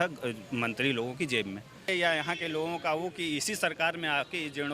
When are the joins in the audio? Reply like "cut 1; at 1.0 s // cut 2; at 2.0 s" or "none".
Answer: cut 1; at 1.9 s